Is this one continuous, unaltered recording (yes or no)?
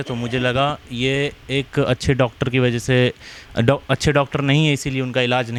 yes